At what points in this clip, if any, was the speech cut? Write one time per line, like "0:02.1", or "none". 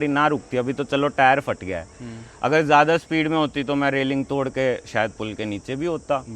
none